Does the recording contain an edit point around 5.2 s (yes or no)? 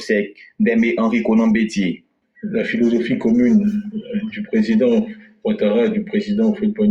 yes